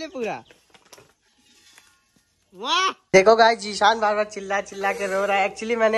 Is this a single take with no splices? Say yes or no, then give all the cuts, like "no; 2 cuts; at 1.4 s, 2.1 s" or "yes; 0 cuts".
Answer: no; 1 cut; at 3.0 s